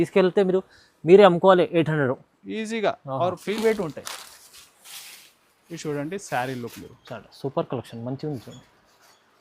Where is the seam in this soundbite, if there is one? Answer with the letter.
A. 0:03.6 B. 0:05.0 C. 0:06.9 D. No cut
A